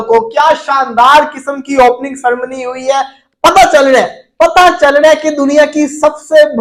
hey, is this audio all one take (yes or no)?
yes